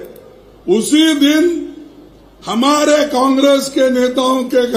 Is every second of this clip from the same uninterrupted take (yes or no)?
yes